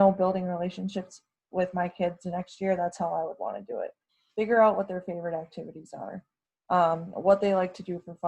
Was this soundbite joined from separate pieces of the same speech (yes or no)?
no